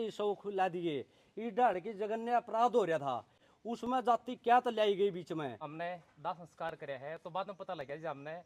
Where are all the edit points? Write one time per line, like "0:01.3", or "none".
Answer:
0:05.7